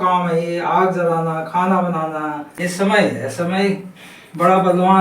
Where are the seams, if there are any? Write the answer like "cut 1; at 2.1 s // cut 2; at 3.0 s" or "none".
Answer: cut 1; at 2.6 s